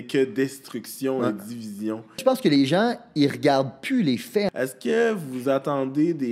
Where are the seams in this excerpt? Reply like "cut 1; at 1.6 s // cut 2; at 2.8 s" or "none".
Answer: cut 1; at 2.2 s // cut 2; at 4.5 s

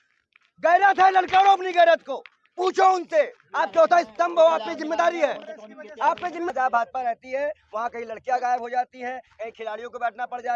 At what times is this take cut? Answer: cut 1; at 6.5 s

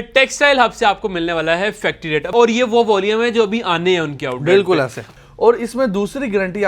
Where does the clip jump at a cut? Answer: cut 1; at 2.3 s // cut 2; at 5.1 s

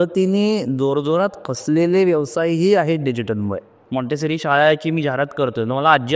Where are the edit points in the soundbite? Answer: cut 1; at 3.7 s

